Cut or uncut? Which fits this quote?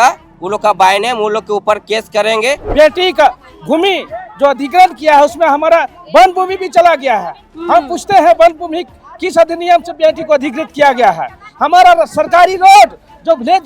cut